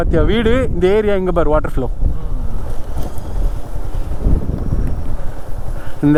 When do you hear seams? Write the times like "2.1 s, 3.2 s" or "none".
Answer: none